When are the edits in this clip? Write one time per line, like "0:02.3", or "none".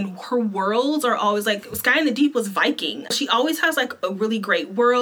0:03.1